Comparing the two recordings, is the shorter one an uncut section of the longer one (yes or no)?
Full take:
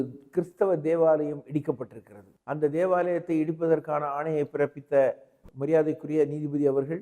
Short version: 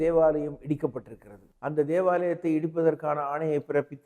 yes